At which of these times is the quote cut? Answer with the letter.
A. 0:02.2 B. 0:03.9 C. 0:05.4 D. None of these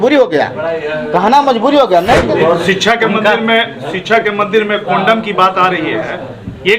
A